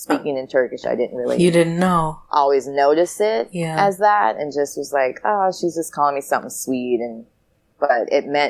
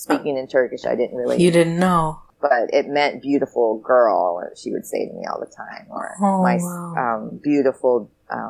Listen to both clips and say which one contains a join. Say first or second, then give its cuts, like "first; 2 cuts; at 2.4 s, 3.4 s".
second; 1 cut; at 2.2 s